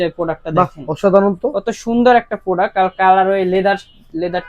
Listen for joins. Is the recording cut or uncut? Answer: uncut